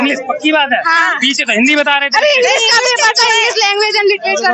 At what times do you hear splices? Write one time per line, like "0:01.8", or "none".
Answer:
none